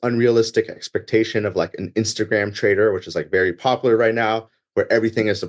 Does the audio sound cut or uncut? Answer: uncut